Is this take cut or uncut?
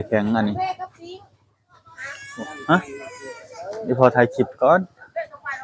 uncut